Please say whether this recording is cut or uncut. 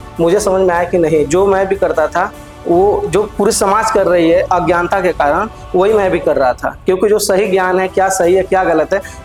uncut